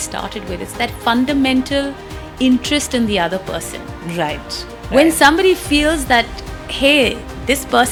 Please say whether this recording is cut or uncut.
uncut